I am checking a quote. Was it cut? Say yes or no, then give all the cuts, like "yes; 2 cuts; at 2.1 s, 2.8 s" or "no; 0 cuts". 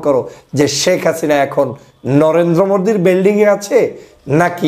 no; 0 cuts